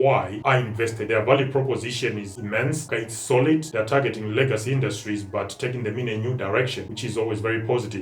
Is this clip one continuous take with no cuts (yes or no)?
no